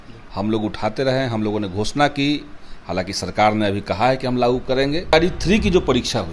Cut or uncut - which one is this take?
cut